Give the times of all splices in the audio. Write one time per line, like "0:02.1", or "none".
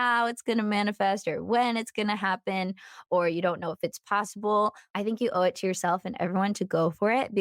0:04.8